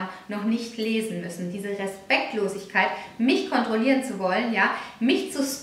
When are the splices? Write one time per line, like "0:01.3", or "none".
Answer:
none